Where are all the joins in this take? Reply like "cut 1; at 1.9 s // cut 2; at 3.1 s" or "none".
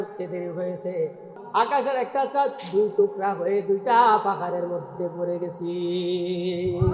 cut 1; at 1.3 s

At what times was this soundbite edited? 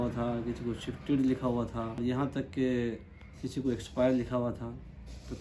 cut 1; at 2.0 s

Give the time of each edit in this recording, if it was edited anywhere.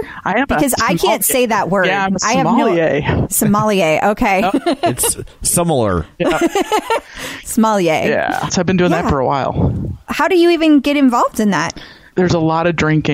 cut 1; at 3.3 s // cut 2; at 7.0 s // cut 3; at 8.5 s

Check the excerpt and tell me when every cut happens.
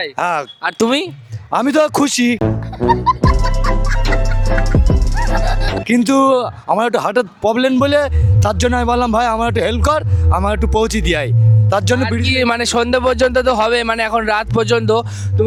none

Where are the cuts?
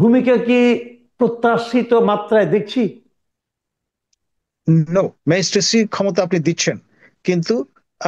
cut 1; at 5.2 s

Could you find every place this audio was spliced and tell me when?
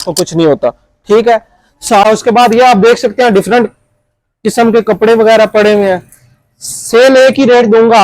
cut 1; at 2.0 s

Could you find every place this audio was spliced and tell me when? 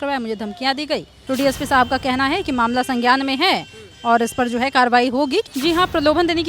cut 1; at 1.1 s // cut 2; at 5.5 s

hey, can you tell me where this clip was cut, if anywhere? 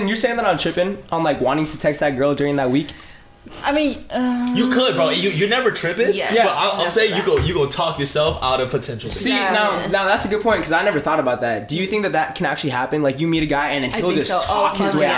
none

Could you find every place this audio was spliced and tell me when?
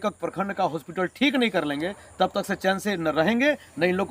none

